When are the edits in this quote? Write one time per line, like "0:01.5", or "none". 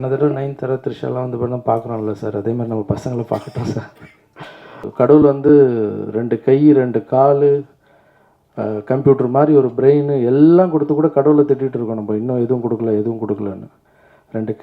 0:04.9